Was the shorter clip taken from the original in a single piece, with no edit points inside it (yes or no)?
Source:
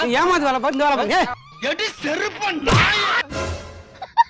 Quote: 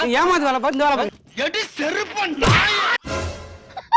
no